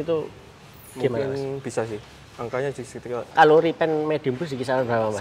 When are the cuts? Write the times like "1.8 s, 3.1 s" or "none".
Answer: 3.3 s